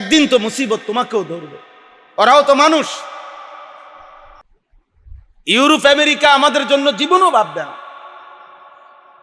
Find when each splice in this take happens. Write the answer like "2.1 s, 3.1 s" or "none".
4.5 s